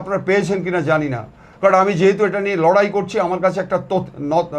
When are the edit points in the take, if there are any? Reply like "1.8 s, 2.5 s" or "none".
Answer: none